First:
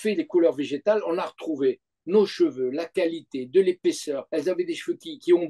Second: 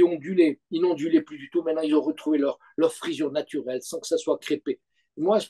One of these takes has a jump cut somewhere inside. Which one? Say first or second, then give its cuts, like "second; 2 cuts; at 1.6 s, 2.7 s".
first; 1 cut; at 4.2 s